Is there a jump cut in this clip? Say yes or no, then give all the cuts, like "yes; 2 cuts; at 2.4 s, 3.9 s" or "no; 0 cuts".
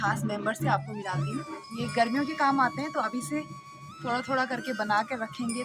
yes; 1 cut; at 1.6 s